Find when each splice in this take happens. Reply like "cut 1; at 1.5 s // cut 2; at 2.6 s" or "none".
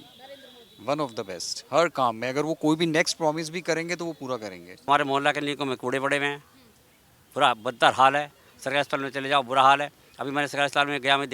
cut 1; at 4.9 s